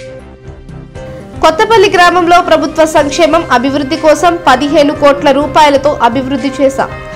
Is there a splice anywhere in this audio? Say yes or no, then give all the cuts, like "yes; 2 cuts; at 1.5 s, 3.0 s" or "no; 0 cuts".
yes; 1 cut; at 1.0 s